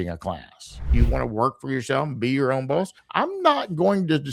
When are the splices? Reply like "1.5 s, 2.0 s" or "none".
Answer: 0.9 s, 3.0 s

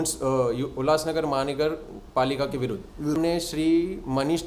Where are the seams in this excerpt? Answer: 3.2 s

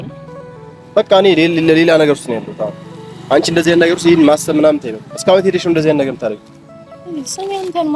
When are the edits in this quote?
none

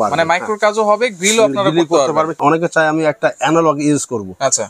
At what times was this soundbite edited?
2.3 s

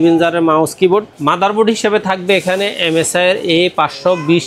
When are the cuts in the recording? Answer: 1.1 s

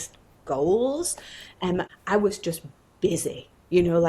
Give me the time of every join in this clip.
1.9 s

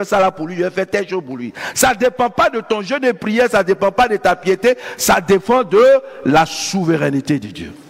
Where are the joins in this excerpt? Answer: none

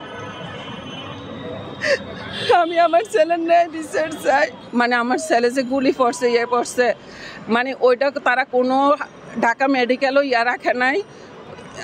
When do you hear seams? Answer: 4.6 s

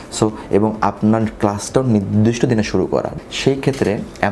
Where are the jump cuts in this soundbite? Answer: 3.1 s

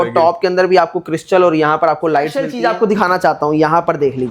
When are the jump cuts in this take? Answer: 2.5 s

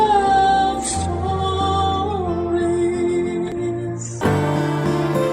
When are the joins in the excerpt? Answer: 4.1 s

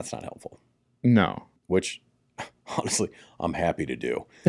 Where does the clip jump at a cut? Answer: 1.5 s

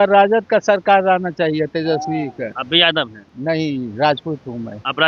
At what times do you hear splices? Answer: 2.6 s, 3.2 s

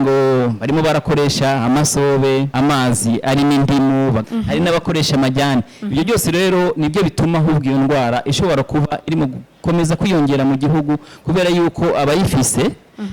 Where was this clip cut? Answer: 2.5 s, 4.2 s

